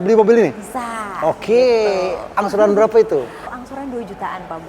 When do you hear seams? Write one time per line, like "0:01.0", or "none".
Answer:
0:03.5